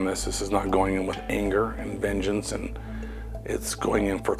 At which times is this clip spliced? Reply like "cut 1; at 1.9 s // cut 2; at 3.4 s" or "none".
none